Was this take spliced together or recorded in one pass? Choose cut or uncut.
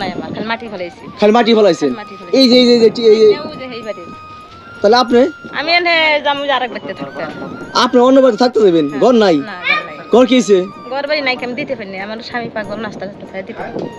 uncut